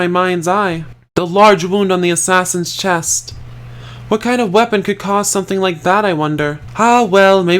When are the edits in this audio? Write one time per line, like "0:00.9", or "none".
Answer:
0:00.9
0:06.6

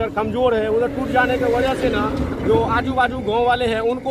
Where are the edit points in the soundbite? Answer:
none

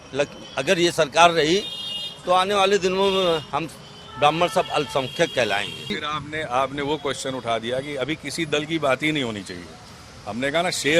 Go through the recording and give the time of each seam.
0:05.9

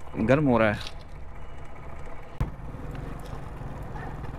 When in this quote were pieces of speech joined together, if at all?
0:02.4

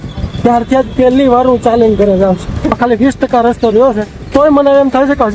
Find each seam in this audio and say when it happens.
0:02.8
0:04.3

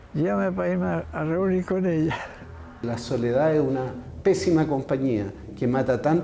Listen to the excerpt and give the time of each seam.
0:02.7

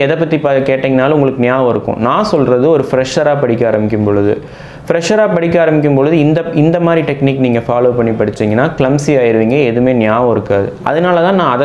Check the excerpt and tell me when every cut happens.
none

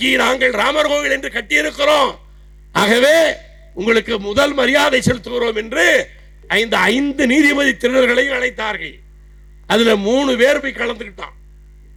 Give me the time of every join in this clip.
none

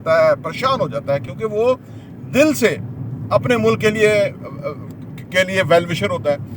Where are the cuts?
none

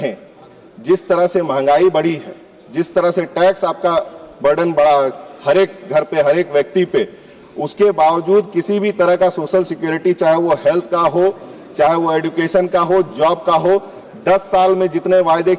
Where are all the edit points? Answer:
none

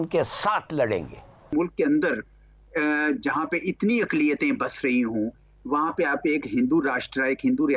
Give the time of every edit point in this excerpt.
0:01.4

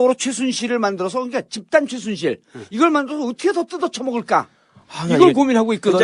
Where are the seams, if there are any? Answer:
0:01.2

